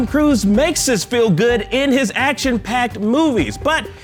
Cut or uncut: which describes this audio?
uncut